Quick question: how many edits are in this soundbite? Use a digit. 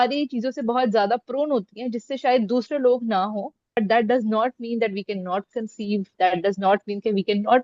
1